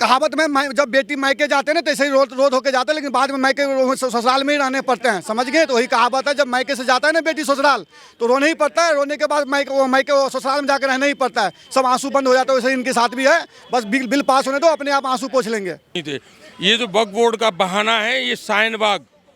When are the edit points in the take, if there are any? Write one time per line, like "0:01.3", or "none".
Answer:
0:16.0